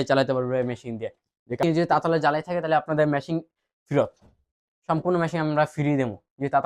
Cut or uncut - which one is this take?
cut